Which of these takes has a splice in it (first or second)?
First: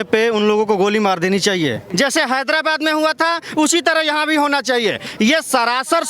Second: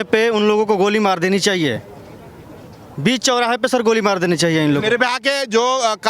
first